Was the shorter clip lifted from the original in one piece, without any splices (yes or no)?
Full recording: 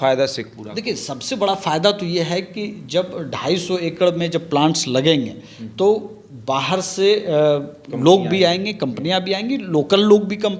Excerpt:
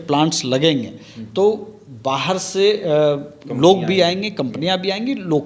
yes